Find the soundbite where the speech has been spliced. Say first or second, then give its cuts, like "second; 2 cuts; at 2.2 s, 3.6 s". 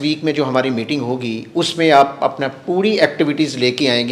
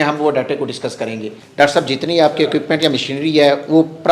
second; 1 cut; at 1.4 s